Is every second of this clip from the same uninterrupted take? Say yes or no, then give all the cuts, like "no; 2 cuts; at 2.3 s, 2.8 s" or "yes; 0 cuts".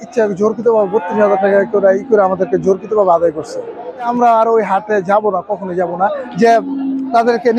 no; 2 cuts; at 4.1 s, 6.2 s